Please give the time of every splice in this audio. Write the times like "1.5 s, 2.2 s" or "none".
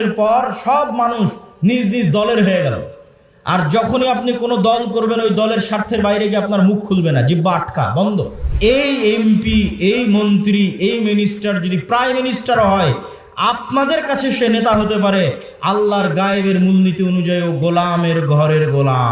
8.4 s